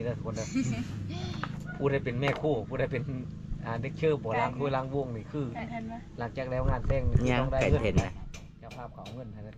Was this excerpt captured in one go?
yes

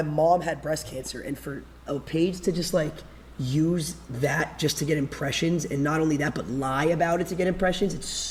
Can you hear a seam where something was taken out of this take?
no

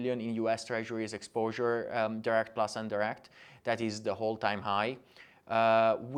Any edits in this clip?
no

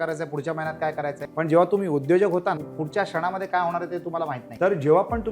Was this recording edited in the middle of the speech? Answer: yes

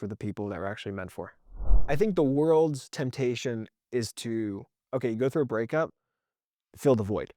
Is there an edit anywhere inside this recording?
yes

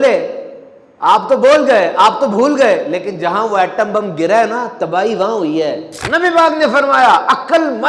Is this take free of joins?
no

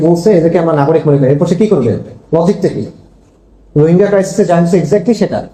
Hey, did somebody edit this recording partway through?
no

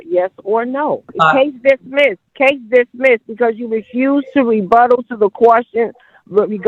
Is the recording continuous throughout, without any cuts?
no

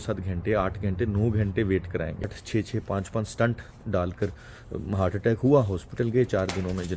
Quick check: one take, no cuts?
no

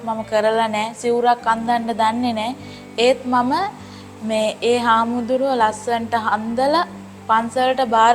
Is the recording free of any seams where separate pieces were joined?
yes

